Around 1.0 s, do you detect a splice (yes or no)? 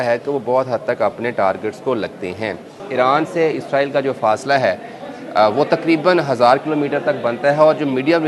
no